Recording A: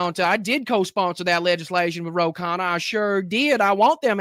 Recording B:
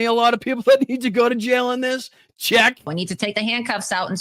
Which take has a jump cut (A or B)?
B